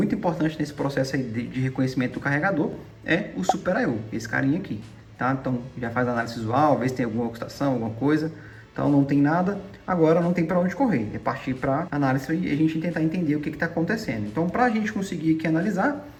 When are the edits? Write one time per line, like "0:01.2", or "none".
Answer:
none